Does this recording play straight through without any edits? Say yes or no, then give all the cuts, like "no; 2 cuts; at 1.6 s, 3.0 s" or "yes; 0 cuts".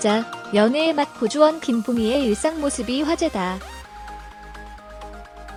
yes; 0 cuts